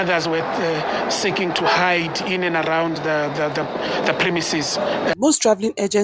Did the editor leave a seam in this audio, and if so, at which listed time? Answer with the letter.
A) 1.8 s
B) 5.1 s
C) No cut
B